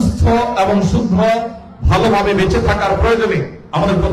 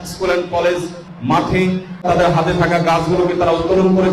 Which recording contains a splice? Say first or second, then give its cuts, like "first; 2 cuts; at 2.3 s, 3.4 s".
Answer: second; 2 cuts; at 1.1 s, 2.0 s